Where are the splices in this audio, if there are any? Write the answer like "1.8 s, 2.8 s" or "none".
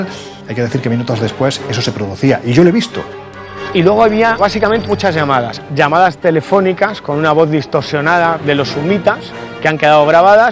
3.0 s